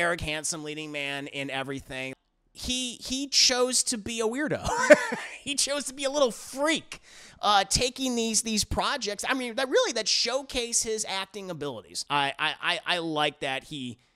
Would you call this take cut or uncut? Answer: cut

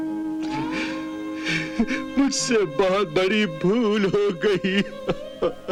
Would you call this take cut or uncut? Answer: uncut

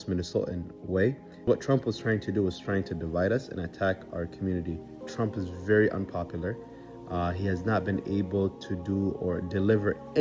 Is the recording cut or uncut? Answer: cut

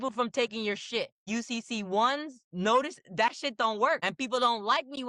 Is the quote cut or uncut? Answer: cut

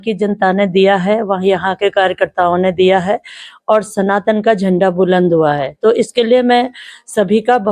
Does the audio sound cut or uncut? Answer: uncut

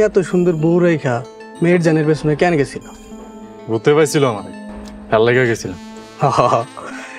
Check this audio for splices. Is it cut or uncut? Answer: uncut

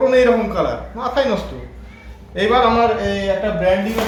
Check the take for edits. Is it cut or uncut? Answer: uncut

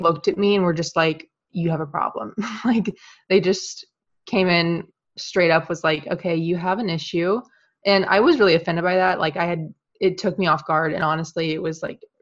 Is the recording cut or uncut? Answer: cut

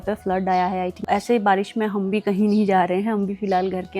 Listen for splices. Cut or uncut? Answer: cut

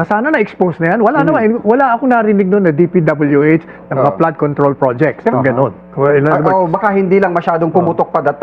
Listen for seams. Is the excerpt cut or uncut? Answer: cut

